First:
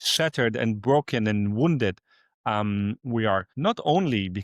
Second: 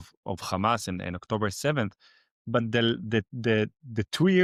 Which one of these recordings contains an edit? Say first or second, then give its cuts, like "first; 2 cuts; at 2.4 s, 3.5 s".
first; 1 cut; at 3.5 s